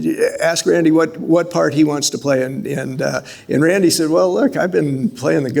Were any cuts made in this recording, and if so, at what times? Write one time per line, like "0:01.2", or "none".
none